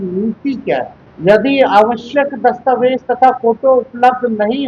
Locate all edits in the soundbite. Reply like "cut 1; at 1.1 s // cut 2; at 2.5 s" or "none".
cut 1; at 1.0 s